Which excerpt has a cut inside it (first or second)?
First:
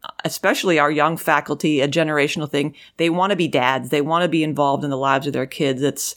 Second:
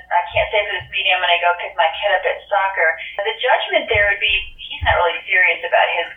second